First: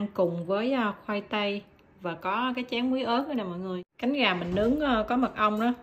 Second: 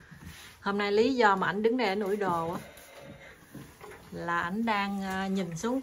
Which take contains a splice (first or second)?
first